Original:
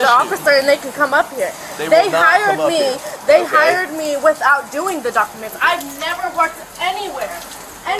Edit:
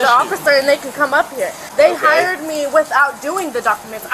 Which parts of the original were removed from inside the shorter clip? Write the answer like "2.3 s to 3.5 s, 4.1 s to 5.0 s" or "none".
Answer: 1.6 s to 3.1 s